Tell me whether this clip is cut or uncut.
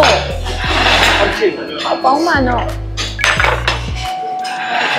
uncut